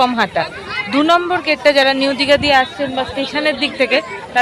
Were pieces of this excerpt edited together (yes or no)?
no